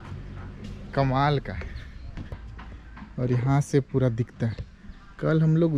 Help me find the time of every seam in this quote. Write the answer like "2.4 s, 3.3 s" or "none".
2.3 s